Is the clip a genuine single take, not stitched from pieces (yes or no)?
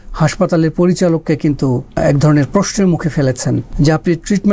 no